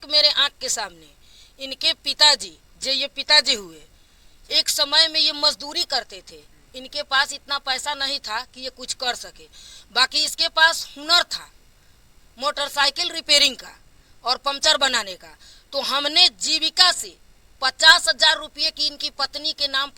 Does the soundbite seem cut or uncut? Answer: uncut